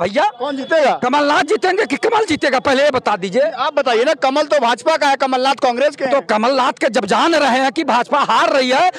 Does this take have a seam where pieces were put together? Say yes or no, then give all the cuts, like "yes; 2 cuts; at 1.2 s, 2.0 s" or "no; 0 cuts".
no; 0 cuts